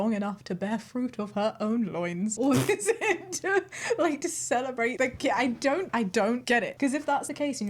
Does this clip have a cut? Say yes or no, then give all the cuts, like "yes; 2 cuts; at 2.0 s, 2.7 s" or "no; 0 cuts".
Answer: no; 0 cuts